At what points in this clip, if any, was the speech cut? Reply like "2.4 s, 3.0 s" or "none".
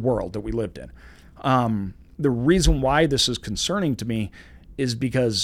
none